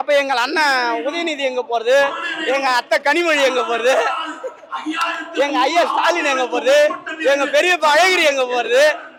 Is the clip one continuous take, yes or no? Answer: yes